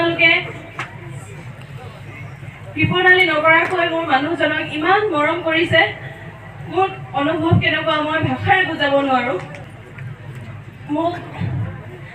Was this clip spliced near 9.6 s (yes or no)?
yes